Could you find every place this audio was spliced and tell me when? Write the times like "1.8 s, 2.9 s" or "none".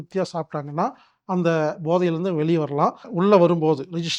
3.1 s